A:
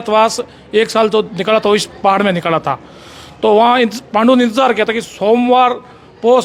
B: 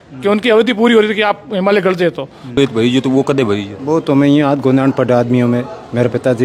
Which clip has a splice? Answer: B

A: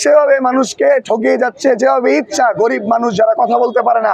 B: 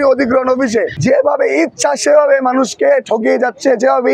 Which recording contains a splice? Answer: B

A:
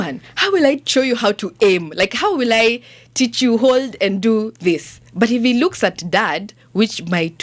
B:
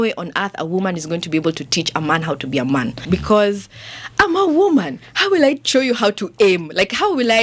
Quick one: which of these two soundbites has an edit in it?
B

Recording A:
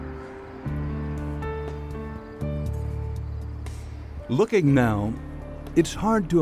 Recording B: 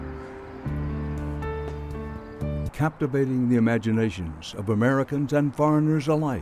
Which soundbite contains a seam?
A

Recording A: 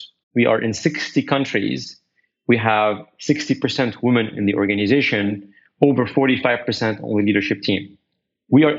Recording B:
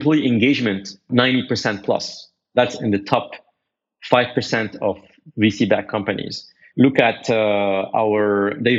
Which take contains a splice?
B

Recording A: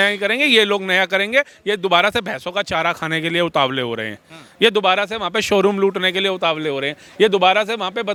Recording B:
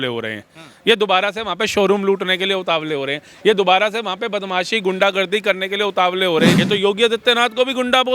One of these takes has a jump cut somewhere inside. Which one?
B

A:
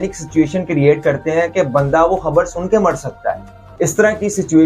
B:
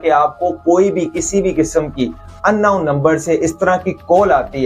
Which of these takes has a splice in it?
A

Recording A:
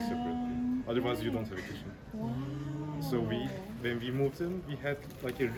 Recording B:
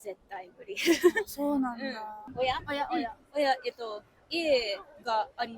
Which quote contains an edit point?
B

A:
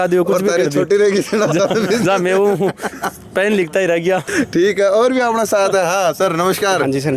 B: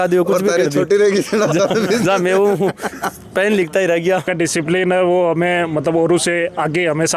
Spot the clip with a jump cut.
B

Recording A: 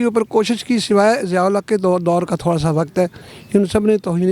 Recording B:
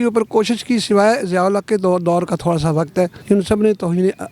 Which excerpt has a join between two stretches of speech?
B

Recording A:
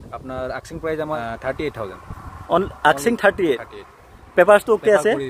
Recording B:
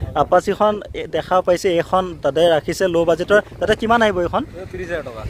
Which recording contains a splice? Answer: A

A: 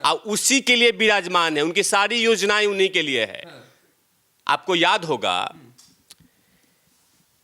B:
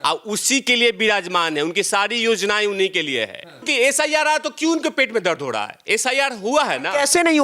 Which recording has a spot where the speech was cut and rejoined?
B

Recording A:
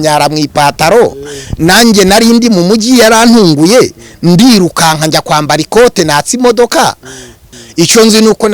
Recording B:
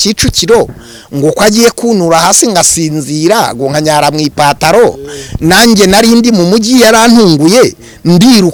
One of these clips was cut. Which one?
A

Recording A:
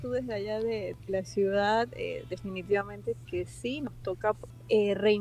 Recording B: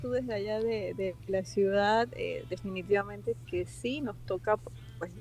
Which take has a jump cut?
A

